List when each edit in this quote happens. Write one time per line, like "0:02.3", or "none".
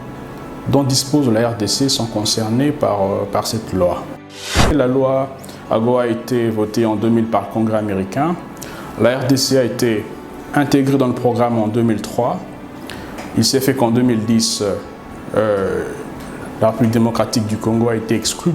0:04.7